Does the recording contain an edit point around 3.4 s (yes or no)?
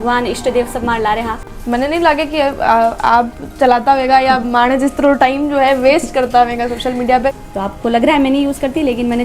no